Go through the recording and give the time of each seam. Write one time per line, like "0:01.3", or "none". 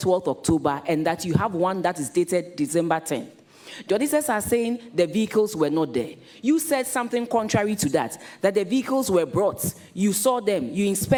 none